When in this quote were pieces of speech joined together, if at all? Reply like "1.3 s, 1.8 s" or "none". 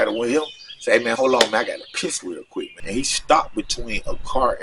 2.8 s